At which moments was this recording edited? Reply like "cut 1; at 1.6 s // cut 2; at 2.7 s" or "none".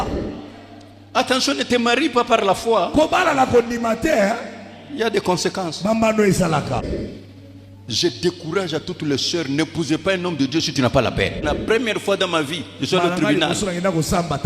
cut 1; at 6.9 s // cut 2; at 11.4 s